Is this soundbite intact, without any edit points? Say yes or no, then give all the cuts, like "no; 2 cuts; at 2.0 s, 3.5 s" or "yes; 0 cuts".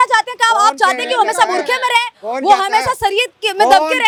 yes; 0 cuts